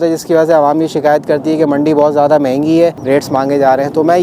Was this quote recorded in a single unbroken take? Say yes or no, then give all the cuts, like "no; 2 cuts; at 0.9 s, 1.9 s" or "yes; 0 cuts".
no; 1 cut; at 3.0 s